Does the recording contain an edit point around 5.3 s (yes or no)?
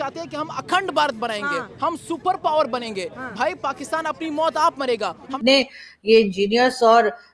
yes